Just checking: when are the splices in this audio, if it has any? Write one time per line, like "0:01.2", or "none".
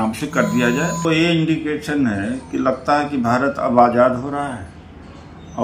0:01.0